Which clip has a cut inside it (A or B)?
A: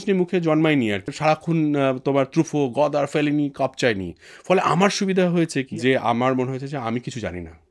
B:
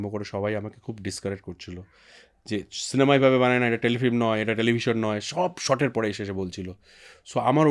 A